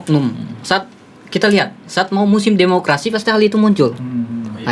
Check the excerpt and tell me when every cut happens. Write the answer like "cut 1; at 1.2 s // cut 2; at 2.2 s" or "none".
none